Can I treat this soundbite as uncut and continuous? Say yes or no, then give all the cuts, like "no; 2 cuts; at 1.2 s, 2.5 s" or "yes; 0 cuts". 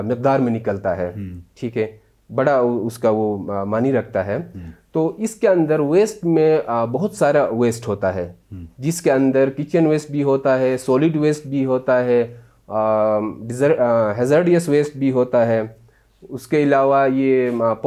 yes; 0 cuts